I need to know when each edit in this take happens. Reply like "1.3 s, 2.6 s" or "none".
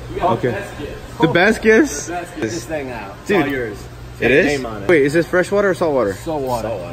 2.4 s, 4.9 s

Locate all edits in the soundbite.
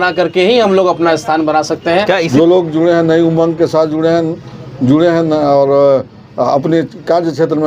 2.3 s

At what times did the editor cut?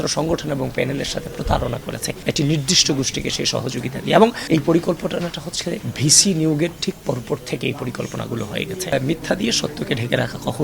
2.1 s, 4.4 s, 8.8 s

